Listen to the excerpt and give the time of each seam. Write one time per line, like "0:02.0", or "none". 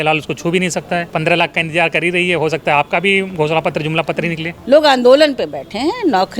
0:01.1
0:04.5